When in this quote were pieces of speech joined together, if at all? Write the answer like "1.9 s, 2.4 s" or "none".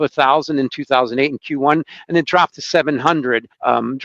none